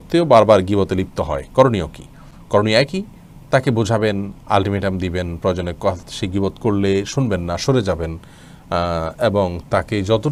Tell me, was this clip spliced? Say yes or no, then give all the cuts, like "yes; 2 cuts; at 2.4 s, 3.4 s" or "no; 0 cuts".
no; 0 cuts